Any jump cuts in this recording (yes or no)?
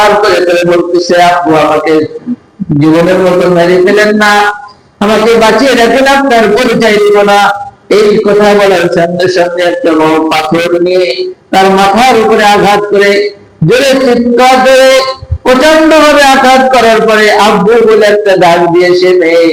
no